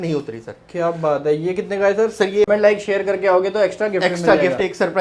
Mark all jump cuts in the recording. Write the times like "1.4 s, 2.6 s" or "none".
2.5 s